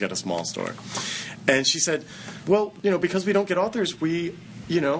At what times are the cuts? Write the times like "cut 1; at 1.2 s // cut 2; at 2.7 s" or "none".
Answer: cut 1; at 2.6 s